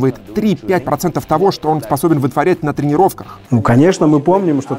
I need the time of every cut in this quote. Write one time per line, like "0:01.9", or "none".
0:03.3

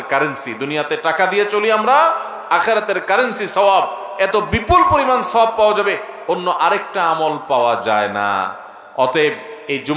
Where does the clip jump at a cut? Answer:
none

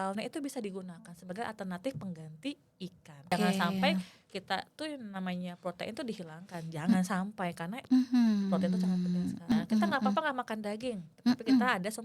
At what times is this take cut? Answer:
0:03.2
0:09.5

